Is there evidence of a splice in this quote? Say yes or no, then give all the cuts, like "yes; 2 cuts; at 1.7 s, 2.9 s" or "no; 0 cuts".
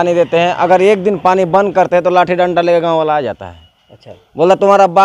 no; 0 cuts